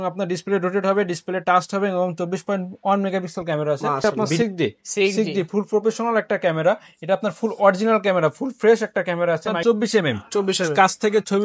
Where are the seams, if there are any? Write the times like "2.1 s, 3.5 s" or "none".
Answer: 4.0 s, 9.5 s